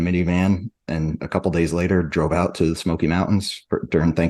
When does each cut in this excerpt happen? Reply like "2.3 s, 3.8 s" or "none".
none